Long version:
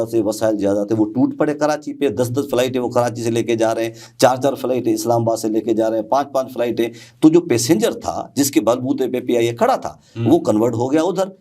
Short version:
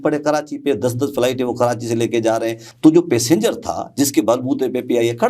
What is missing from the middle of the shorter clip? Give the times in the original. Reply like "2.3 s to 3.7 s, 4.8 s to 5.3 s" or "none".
4.0 s to 7.0 s